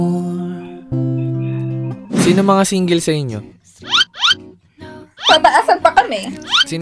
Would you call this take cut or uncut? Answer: cut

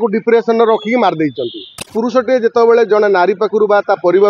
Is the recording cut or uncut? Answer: cut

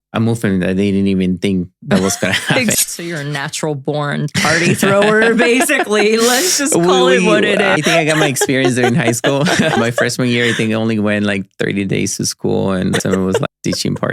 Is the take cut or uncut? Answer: cut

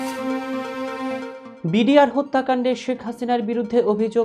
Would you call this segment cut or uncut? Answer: uncut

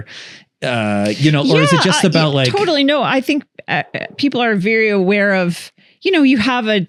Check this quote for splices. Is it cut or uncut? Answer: uncut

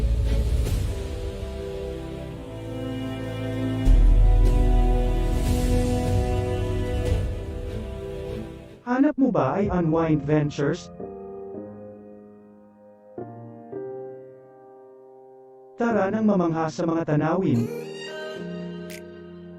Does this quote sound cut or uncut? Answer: cut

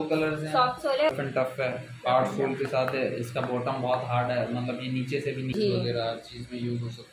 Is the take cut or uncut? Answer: cut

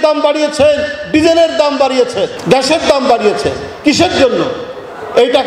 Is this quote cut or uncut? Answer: uncut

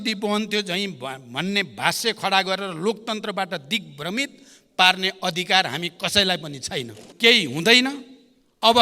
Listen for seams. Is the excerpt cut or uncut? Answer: cut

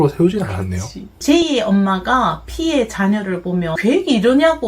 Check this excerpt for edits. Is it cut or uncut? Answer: cut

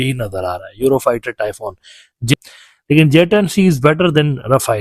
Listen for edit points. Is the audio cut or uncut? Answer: cut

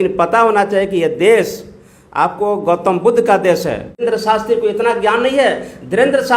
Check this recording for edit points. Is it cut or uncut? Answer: cut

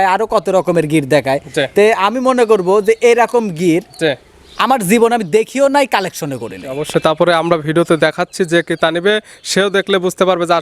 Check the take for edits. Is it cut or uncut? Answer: uncut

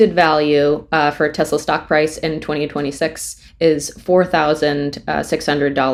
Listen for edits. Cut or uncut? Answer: uncut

